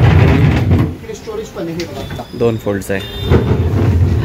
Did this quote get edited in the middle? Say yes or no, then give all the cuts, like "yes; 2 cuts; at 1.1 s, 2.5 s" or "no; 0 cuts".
yes; 1 cut; at 2.2 s